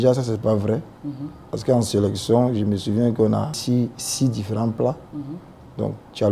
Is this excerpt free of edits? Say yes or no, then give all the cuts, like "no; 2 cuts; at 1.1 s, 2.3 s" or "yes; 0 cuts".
no; 1 cut; at 3.6 s